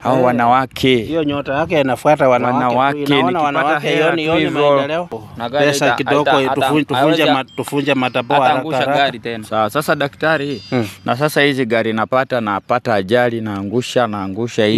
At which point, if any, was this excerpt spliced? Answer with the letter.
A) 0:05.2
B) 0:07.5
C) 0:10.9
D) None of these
A